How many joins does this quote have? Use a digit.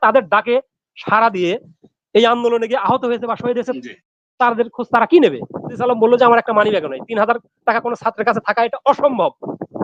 1